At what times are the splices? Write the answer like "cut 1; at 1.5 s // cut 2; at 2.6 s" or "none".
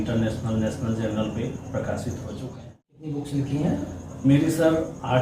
cut 1; at 3.1 s